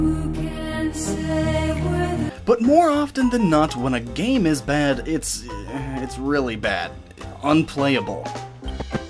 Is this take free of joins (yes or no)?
no